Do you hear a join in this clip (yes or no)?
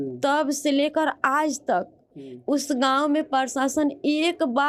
no